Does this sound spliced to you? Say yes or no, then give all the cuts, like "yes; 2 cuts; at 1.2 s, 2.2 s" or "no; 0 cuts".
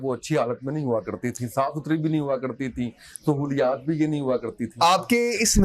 no; 0 cuts